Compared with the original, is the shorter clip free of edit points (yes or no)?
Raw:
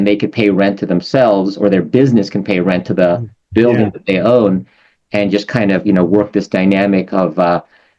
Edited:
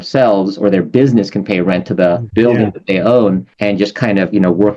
no